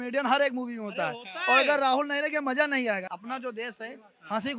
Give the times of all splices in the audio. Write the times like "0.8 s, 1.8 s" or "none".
3.0 s